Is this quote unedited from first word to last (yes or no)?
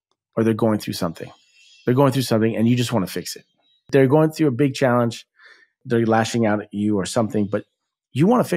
no